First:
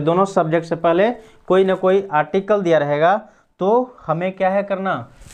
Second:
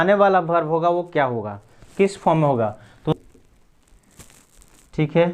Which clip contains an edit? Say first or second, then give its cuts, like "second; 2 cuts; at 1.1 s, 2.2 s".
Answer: second; 1 cut; at 3.1 s